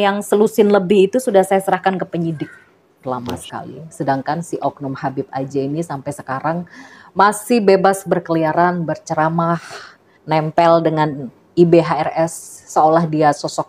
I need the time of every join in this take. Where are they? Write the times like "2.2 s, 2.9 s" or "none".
3.0 s